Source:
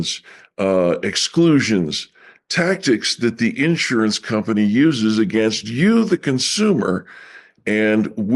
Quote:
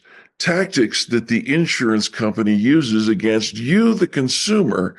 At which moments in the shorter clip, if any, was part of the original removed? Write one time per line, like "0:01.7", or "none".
none